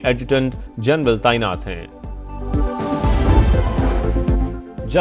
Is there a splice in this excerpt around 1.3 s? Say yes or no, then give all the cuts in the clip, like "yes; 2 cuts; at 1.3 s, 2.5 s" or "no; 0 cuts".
no; 1 cut; at 3.6 s